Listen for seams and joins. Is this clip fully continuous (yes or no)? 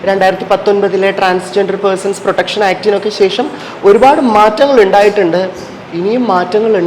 yes